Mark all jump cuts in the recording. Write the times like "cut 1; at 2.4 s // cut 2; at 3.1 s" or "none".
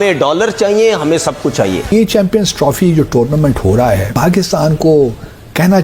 cut 1; at 1.9 s // cut 2; at 4.1 s